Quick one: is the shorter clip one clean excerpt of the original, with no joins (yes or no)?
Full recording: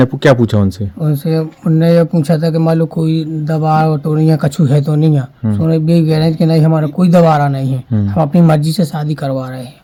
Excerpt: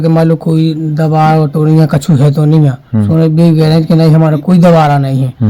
yes